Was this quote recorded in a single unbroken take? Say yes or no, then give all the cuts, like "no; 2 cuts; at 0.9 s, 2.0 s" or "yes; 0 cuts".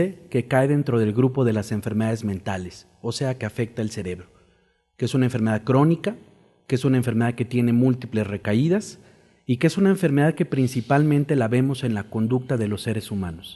no; 1 cut; at 4.6 s